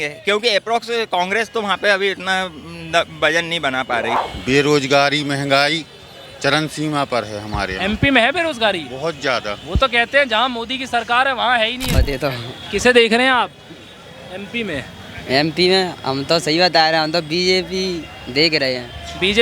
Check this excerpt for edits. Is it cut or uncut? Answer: cut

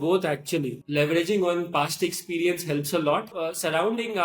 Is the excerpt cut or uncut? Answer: cut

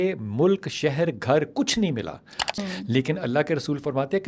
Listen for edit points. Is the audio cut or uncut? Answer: cut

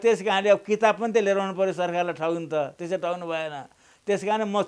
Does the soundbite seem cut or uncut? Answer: uncut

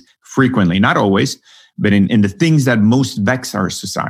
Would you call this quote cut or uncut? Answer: cut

